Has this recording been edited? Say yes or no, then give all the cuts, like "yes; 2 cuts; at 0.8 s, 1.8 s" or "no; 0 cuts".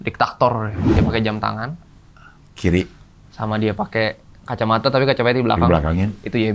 yes; 1 cut; at 1.0 s